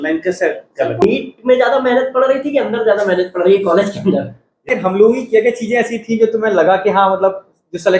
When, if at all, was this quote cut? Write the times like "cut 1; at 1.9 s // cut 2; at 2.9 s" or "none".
cut 1; at 1.0 s // cut 2; at 4.7 s

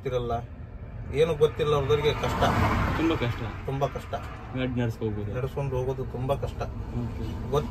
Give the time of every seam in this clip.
none

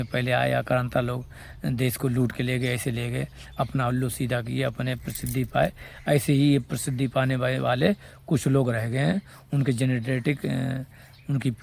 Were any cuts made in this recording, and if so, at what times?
none

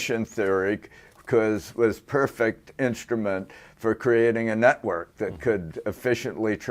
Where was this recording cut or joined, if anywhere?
cut 1; at 4.3 s

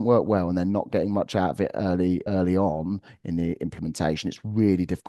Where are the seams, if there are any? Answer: cut 1; at 2.2 s

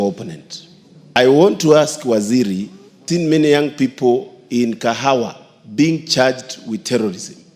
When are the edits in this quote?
cut 1; at 3.0 s

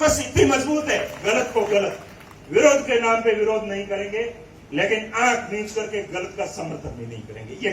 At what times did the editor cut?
cut 1; at 1.1 s

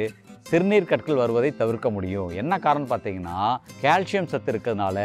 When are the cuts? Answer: cut 1; at 3.7 s

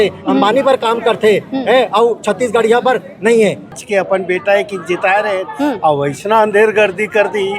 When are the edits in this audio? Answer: cut 1; at 3.8 s

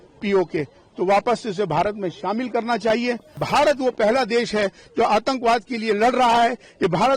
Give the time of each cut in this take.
cut 1; at 3.3 s

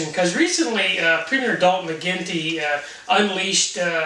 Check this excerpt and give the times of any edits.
cut 1; at 1.8 s

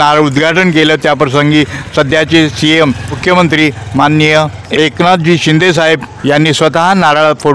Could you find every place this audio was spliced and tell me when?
cut 1; at 3.2 s // cut 2; at 4.6 s // cut 3; at 6.1 s

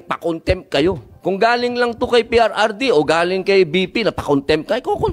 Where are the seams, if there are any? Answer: cut 1; at 1.1 s

